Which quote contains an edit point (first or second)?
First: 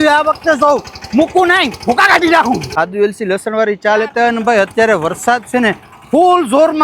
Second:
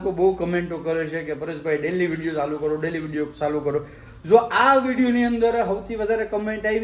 first